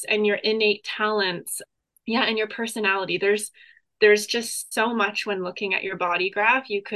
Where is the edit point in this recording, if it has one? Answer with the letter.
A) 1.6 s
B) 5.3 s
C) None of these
A